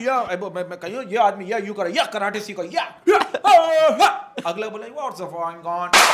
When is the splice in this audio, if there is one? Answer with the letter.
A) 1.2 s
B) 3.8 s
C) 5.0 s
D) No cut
D